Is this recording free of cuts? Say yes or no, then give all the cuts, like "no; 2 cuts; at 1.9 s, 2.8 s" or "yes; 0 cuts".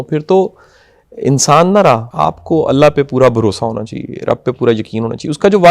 no; 1 cut; at 2.1 s